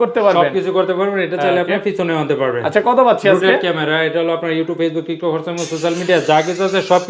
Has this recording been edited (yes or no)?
no